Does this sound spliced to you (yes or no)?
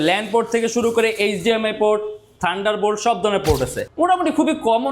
yes